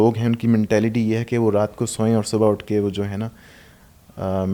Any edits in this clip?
no; 0 cuts

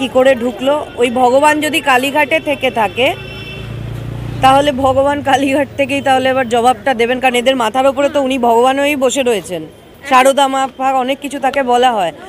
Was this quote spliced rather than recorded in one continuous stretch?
no; 0 cuts

